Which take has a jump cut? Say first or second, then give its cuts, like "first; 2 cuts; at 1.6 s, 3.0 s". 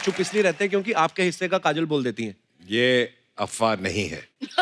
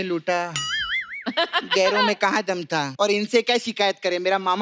second; 1 cut; at 2.9 s